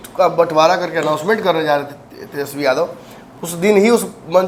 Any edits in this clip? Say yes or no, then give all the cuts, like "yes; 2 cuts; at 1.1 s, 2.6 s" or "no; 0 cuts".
no; 0 cuts